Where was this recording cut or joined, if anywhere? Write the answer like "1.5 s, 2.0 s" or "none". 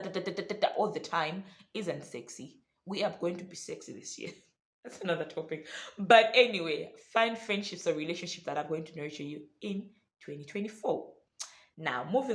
none

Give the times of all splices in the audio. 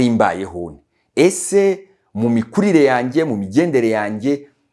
none

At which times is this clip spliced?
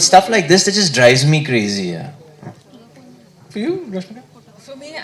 none

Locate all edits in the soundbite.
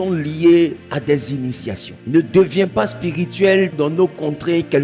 0.8 s, 1.9 s, 3.7 s

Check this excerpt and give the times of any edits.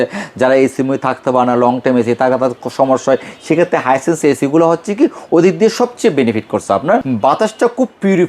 7.0 s

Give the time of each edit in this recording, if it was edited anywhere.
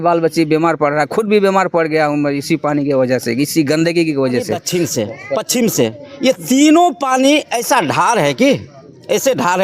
4.6 s

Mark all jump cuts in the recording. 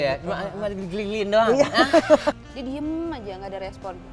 2.4 s

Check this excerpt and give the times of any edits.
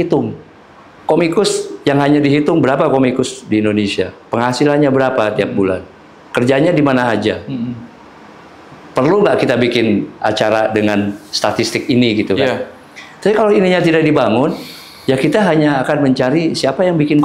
none

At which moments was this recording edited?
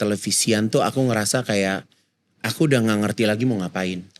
none

